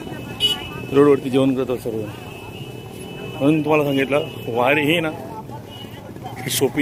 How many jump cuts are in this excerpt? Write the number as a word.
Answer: zero